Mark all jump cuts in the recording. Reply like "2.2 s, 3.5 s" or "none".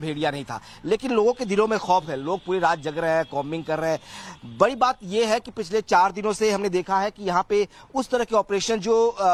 none